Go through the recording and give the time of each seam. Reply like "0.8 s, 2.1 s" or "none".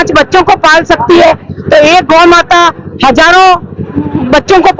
none